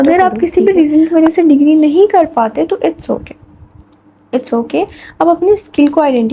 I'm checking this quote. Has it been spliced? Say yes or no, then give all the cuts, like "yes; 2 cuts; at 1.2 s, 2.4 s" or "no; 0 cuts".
no; 0 cuts